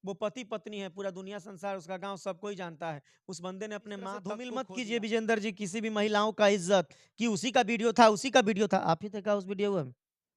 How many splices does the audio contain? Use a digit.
1